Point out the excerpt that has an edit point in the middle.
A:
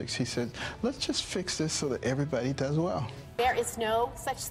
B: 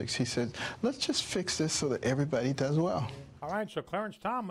A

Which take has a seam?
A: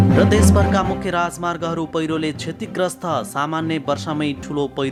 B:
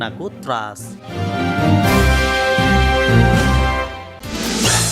B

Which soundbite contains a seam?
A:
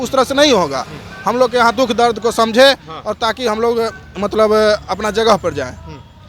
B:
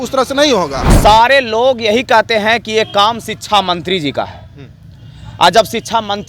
B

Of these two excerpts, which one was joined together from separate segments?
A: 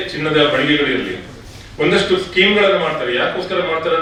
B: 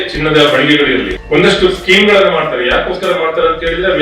B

